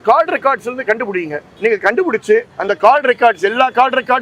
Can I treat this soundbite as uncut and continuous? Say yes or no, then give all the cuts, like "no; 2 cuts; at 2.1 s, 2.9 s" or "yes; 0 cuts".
no; 2 cuts; at 1.4 s, 2.5 s